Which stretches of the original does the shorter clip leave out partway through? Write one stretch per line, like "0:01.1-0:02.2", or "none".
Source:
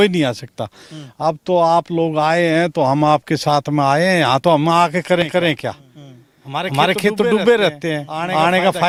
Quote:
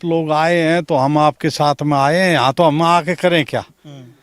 0:05.1-0:05.4